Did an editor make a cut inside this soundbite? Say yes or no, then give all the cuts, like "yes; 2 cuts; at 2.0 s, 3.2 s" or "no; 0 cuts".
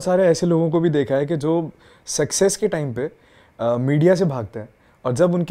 no; 0 cuts